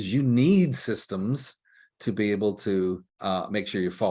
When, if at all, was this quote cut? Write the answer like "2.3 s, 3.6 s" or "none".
3.1 s